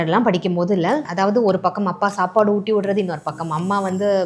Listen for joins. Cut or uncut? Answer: cut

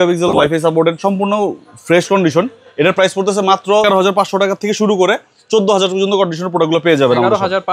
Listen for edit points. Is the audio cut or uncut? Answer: uncut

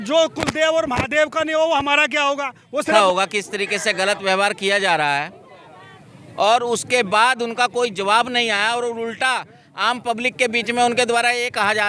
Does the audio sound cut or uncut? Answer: cut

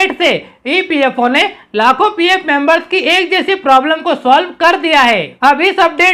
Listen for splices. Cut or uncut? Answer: cut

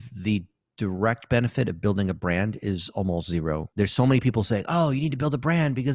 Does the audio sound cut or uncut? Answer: cut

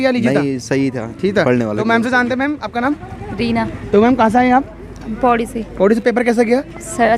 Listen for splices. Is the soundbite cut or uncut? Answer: uncut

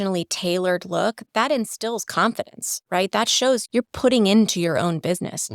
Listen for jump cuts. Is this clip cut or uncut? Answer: cut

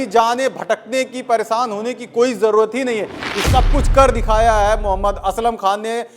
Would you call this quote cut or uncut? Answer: cut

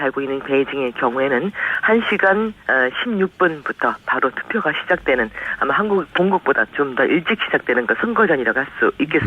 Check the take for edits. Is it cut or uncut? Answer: cut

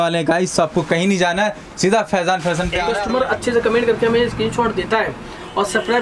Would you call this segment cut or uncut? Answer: cut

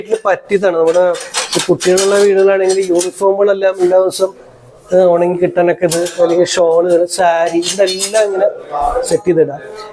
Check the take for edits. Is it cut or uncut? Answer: uncut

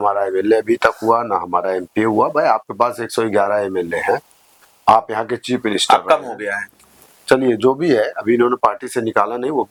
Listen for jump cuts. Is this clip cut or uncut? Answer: uncut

